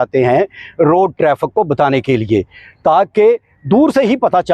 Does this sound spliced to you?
no; 0 cuts

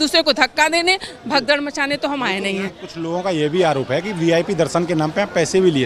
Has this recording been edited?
no; 0 cuts

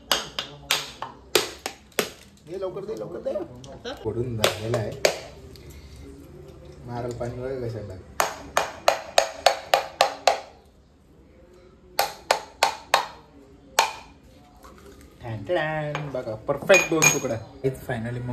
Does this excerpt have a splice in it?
yes; 2 cuts; at 4.0 s, 17.5 s

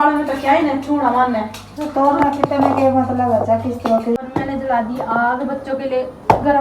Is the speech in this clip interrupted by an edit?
yes; 1 cut; at 4.2 s

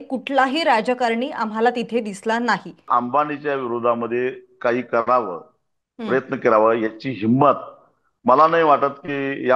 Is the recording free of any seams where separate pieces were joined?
no; 1 cut; at 2.8 s

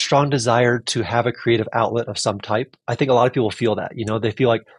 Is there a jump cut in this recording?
no; 0 cuts

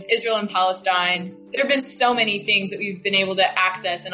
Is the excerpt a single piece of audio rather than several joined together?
no; 1 cut; at 1.4 s

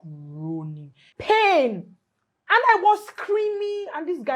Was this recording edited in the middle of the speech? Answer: yes; 1 cut; at 1.0 s

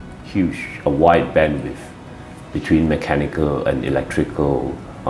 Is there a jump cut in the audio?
no; 0 cuts

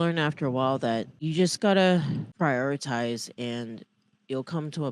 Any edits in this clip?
yes; 2 cuts; at 1.2 s, 2.3 s

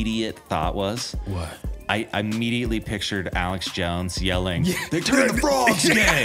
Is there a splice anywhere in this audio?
no; 0 cuts

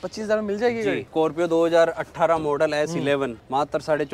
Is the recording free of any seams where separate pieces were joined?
yes; 0 cuts

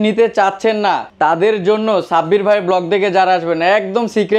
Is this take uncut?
no; 1 cut; at 1.1 s

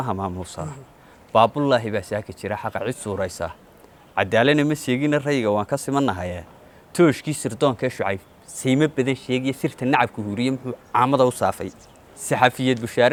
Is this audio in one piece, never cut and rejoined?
yes; 0 cuts

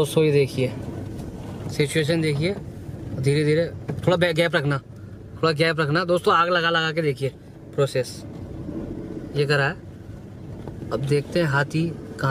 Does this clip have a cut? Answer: no; 0 cuts

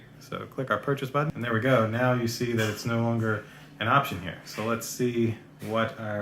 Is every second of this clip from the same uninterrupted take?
yes; 0 cuts

